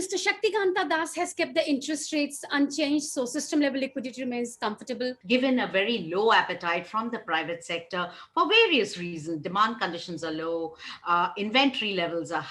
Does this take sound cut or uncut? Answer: cut